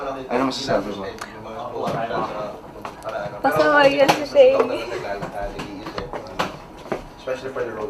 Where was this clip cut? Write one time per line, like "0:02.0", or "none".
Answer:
0:02.2